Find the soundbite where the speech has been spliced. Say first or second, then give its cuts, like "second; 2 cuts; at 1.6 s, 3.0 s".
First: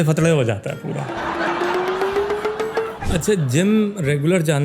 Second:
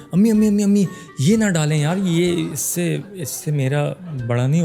first; 1 cut; at 3.0 s